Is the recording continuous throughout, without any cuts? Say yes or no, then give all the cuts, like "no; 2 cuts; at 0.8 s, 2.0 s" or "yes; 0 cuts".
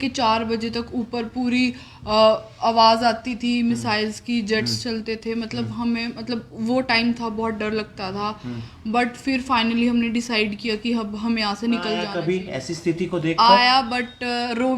no; 1 cut; at 12.1 s